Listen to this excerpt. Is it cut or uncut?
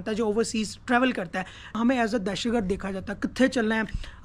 cut